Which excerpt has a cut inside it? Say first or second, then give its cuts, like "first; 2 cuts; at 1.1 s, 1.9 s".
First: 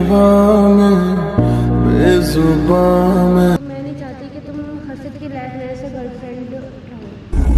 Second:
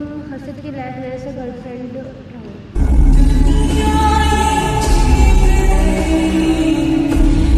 first; 1 cut; at 3.6 s